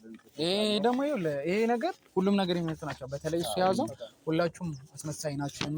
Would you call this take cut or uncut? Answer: uncut